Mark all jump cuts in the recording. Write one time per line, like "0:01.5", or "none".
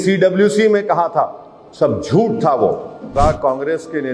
0:03.1